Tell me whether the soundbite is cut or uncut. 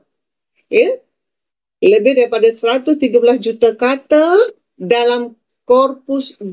uncut